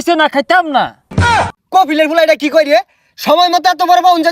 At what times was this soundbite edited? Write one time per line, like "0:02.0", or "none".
0:01.2